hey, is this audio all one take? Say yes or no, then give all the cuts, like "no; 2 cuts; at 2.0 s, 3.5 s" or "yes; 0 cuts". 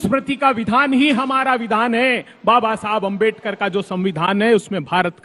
yes; 0 cuts